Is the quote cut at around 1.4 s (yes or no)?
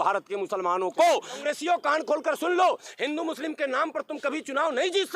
yes